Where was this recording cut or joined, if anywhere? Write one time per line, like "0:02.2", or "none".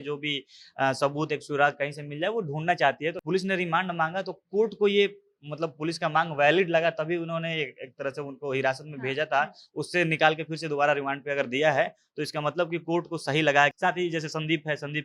0:03.2
0:13.8